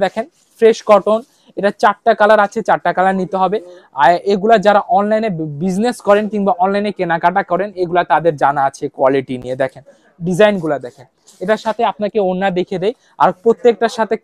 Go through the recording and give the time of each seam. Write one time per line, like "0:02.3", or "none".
none